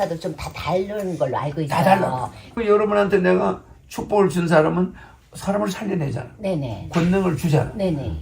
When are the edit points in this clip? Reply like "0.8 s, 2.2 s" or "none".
2.4 s